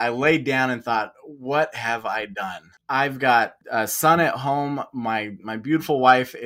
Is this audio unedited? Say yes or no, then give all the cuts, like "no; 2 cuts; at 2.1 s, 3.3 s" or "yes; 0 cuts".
no; 2 cuts; at 2.7 s, 3.6 s